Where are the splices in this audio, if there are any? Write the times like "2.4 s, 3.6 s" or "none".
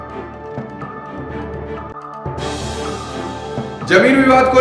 none